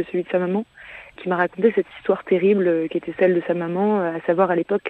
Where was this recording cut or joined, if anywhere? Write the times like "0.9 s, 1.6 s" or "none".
1.1 s

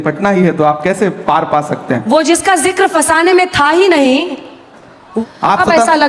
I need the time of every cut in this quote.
5.1 s

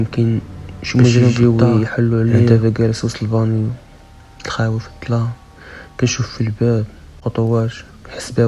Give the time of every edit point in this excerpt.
1.4 s, 2.5 s

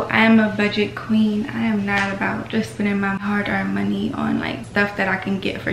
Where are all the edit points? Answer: 3.2 s, 4.6 s

